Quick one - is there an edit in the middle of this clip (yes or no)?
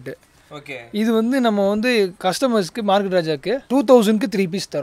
yes